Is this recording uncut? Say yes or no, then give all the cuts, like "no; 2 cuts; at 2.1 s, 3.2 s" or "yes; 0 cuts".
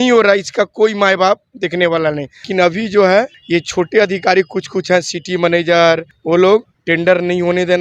no; 4 cuts; at 2.5 s, 3.4 s, 6.1 s, 6.8 s